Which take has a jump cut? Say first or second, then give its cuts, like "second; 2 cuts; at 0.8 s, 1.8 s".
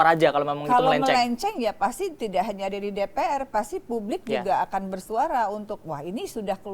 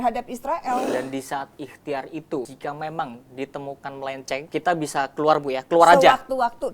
second; 3 cuts; at 0.9 s, 2.5 s, 4.5 s